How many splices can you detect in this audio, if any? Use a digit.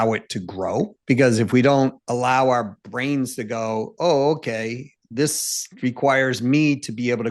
2